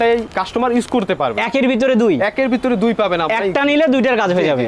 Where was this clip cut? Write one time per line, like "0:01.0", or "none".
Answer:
none